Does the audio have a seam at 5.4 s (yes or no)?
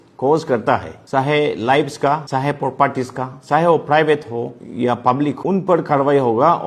yes